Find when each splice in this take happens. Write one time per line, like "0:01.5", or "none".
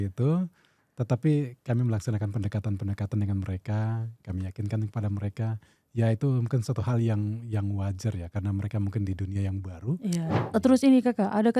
0:10.4